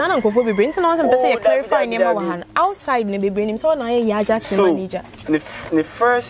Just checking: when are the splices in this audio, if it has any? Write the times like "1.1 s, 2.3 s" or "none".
none